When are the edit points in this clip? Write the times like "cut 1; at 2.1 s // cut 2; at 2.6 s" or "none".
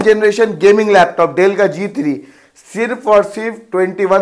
none